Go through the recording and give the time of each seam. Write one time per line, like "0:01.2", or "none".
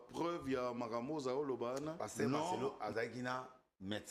0:02.6